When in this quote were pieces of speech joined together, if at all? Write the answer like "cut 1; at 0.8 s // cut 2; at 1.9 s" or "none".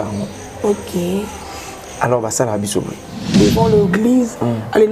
cut 1; at 3.3 s